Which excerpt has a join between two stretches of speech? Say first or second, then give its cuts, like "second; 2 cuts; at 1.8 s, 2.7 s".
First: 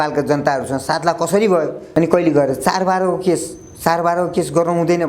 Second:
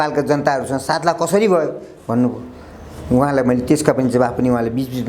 first; 1 cut; at 1.8 s